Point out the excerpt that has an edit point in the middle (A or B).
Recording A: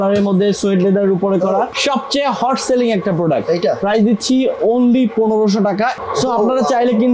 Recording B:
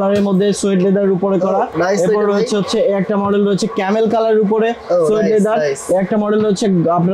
A